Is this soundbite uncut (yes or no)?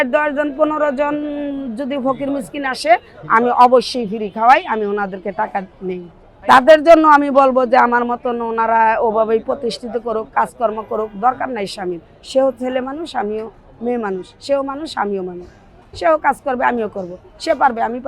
yes